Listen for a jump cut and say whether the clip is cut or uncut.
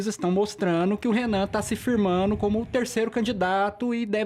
uncut